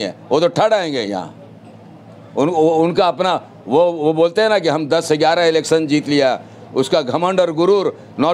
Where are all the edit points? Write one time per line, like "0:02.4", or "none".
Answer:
none